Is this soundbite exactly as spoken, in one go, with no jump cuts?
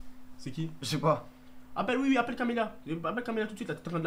yes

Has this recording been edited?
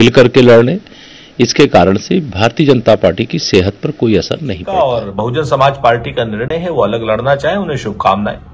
yes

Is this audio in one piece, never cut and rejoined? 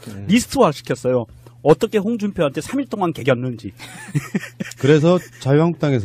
yes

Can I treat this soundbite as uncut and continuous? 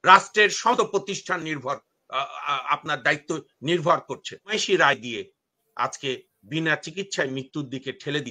no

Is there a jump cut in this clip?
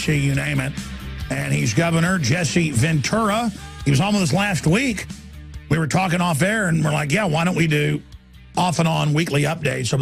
yes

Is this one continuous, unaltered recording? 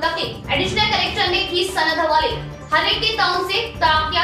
yes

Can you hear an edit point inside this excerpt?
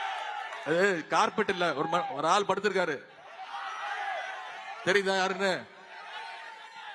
no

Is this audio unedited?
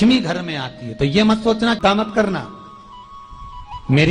yes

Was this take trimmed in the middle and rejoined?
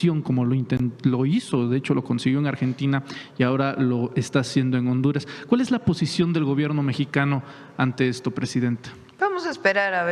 no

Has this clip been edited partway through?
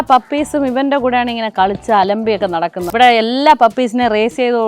yes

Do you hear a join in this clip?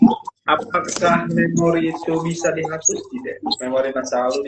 no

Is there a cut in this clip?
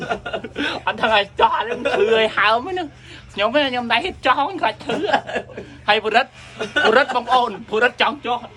no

